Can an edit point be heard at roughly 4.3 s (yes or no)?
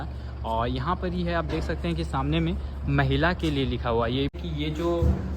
yes